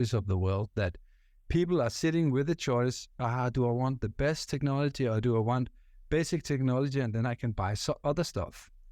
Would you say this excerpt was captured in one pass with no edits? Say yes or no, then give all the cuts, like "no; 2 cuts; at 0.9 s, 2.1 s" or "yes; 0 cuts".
yes; 0 cuts